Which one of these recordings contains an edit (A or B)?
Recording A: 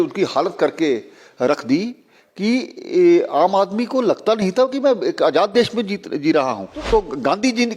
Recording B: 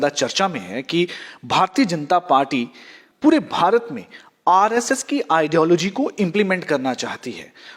A